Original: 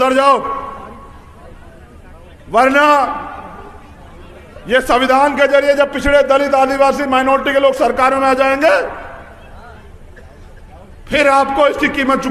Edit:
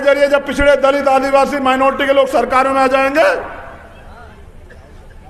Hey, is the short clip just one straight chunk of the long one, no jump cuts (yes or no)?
yes